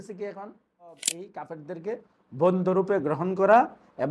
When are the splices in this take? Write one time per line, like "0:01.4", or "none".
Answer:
0:01.3